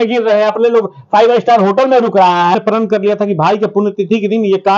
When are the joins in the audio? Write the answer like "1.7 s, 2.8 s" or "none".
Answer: 2.5 s